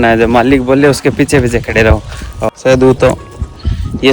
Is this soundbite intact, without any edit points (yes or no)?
no